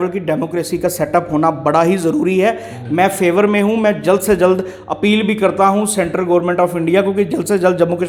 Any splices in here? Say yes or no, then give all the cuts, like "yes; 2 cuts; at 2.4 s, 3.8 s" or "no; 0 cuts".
no; 0 cuts